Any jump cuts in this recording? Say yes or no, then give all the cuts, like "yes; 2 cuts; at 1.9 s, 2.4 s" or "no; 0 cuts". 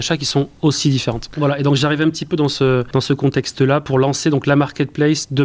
yes; 3 cuts; at 1.3 s, 2.9 s, 3.9 s